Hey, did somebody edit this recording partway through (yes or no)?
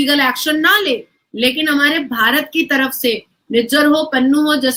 no